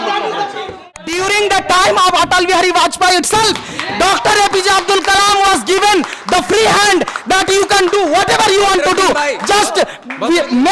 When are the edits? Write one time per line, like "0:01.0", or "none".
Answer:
0:00.9